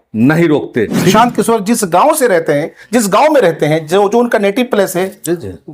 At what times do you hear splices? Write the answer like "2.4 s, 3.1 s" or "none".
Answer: 1.1 s